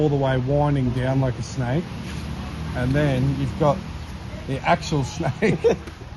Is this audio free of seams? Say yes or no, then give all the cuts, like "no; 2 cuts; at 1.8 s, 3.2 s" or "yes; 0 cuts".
yes; 0 cuts